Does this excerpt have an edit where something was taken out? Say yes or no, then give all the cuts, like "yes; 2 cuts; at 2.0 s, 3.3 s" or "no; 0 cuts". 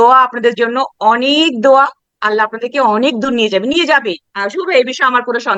no; 0 cuts